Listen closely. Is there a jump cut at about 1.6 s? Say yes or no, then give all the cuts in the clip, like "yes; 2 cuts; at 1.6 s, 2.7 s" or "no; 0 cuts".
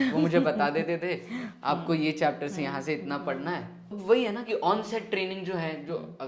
no; 1 cut; at 3.9 s